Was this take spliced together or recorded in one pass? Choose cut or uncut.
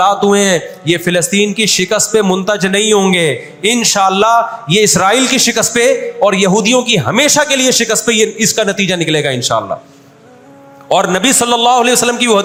uncut